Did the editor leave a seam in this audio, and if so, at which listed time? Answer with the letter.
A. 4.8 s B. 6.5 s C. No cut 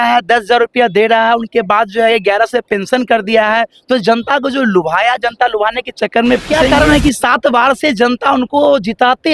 B